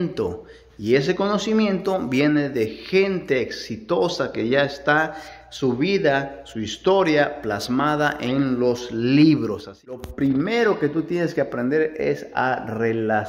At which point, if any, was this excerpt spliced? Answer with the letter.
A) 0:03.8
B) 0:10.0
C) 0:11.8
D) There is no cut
B